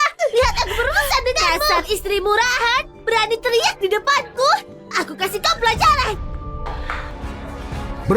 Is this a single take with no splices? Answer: no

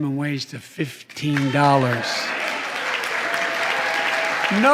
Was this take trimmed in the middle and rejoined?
no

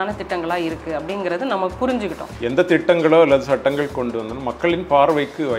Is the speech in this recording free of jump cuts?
no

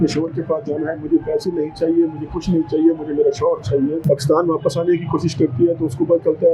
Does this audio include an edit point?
yes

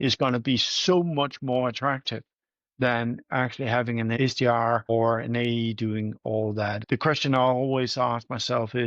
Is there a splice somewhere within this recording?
yes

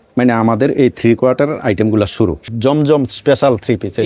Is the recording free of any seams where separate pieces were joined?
no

